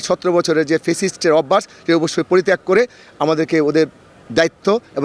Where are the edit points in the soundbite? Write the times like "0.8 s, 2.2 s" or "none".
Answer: none